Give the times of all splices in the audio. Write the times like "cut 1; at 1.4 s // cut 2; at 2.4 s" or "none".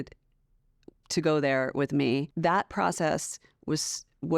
cut 1; at 2.3 s